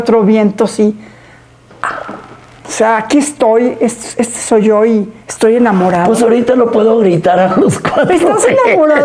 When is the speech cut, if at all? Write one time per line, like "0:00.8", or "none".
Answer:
none

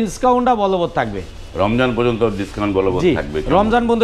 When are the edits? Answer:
none

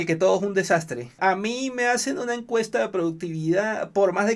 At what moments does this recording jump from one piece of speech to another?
0:01.2

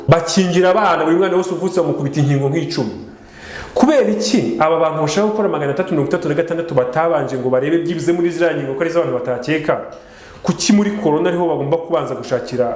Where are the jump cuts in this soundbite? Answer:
none

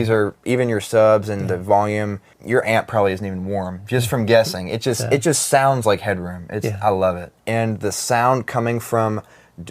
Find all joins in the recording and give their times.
0:02.3
0:07.4

